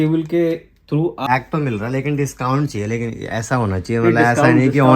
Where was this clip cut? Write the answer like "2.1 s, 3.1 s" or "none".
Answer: 1.3 s